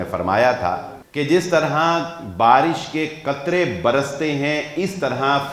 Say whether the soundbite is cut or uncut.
cut